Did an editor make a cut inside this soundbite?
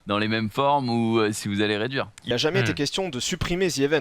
yes; 1 cut; at 2.3 s

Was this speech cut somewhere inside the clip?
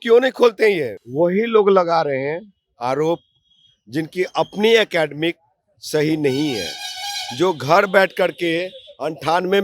yes; 1 cut; at 1.0 s

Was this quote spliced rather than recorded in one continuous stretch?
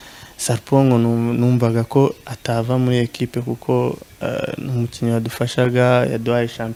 no; 0 cuts

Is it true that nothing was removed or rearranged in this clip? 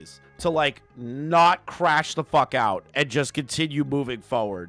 yes; 0 cuts

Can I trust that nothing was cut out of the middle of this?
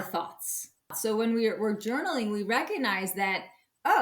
no; 1 cut; at 1.0 s

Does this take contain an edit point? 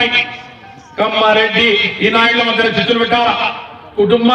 no; 0 cuts

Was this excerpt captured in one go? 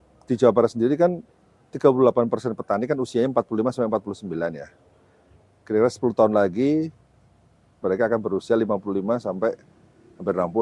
yes; 0 cuts

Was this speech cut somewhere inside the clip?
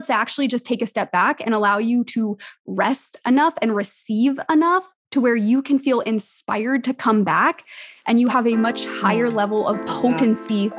no; 0 cuts

